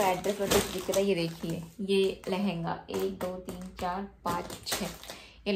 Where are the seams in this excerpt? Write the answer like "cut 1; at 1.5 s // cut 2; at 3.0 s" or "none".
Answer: none